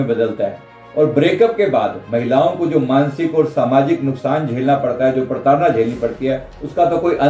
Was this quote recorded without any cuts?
yes; 0 cuts

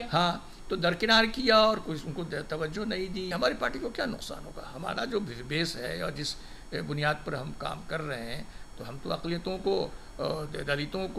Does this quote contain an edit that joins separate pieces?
yes; 1 cut; at 3.3 s

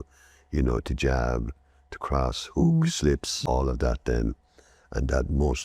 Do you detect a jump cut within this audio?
yes; 1 cut; at 3.3 s

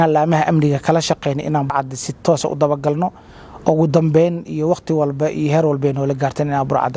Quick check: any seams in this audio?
yes; 1 cut; at 1.7 s

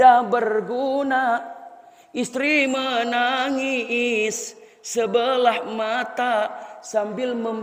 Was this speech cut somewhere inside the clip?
no; 0 cuts

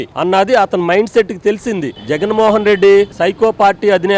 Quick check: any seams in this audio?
yes; 1 cut; at 2.0 s

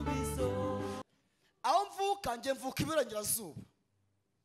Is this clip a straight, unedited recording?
no; 1 cut; at 1.0 s

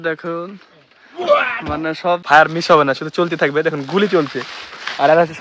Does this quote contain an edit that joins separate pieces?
yes; 1 cut; at 2.2 s

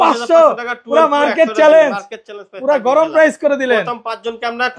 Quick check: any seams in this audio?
no; 0 cuts

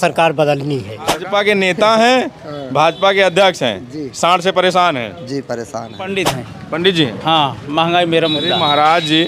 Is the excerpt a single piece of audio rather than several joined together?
no; 2 cuts; at 1.2 s, 6.1 s

